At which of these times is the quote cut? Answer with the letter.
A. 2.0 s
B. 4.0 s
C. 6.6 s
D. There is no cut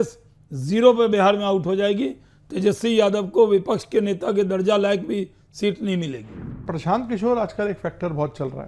C